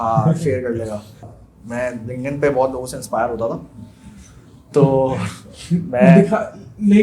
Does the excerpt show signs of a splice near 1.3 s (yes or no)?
yes